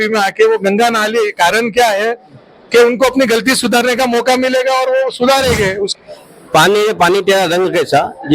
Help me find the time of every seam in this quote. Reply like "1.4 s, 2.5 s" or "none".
5.9 s